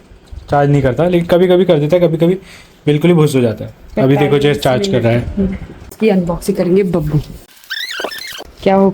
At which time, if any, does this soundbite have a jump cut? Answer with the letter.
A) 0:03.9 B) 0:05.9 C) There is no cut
B